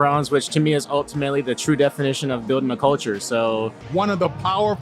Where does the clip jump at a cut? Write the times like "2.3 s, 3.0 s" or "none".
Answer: 3.8 s